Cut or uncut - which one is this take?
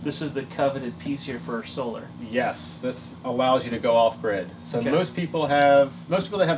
uncut